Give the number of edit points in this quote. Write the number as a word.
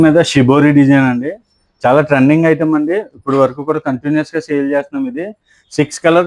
zero